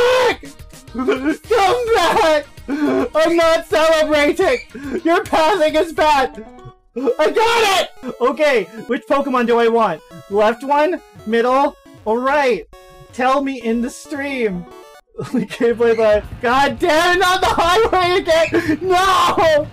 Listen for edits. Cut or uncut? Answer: cut